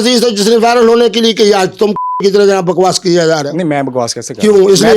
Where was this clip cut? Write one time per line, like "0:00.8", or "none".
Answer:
none